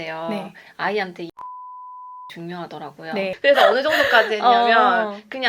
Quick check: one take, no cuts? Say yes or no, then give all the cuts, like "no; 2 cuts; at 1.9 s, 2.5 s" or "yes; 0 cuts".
no; 1 cut; at 3.3 s